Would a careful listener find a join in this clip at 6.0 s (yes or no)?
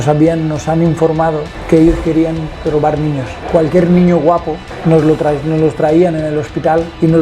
no